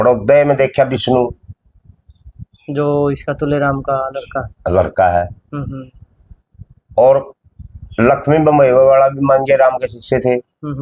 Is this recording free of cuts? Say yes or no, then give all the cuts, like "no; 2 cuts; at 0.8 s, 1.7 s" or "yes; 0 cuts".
yes; 0 cuts